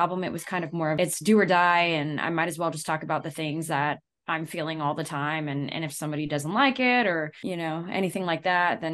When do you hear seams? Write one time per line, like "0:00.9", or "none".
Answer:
0:01.0